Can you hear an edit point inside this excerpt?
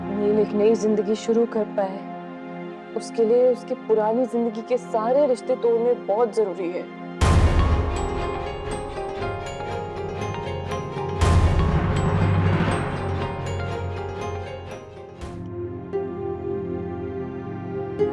no; 0 cuts

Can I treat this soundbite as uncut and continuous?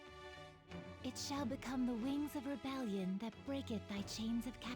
no; 1 cut; at 1.0 s

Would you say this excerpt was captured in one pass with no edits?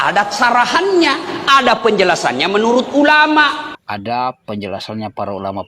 no; 1 cut; at 3.7 s

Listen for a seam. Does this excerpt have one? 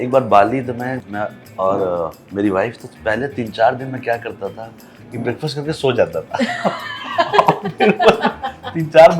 yes; 1 cut; at 1.0 s

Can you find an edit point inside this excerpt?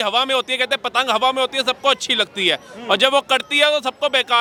no; 0 cuts

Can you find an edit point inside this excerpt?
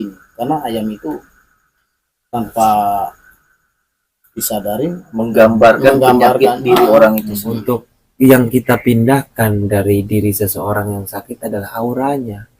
yes; 2 cuts; at 5.0 s, 7.5 s

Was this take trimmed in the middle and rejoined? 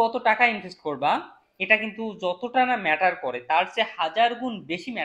no; 0 cuts

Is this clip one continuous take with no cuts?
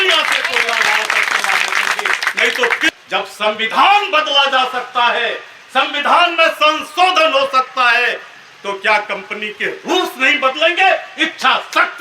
no; 1 cut; at 2.9 s

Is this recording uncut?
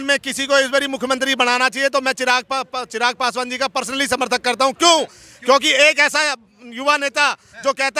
yes; 0 cuts

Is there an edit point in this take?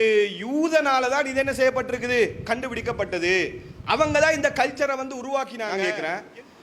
yes; 1 cut; at 5.6 s

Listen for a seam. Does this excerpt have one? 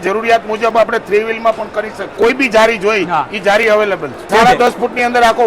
yes; 2 cuts; at 2.2 s, 4.3 s

